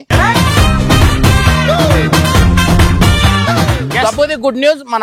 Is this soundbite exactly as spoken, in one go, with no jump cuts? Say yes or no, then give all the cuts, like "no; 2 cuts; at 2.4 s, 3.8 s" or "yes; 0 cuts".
no; 1 cut; at 3.9 s